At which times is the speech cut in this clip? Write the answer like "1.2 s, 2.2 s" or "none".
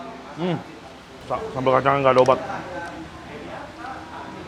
1.2 s